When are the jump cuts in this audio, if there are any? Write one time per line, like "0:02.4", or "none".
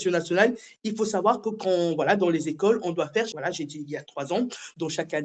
0:03.3